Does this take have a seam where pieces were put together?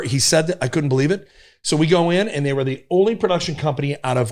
no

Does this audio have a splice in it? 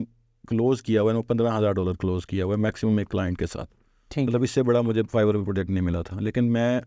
no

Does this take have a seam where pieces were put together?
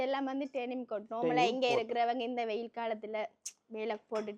no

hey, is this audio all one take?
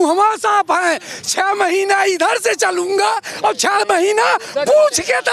yes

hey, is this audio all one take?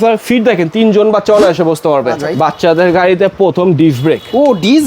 no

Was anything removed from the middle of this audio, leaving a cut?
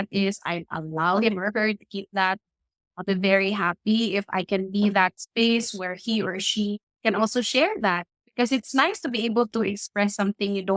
no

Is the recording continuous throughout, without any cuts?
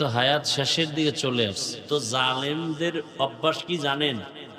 no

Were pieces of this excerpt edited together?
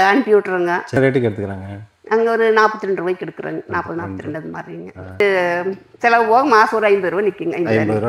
yes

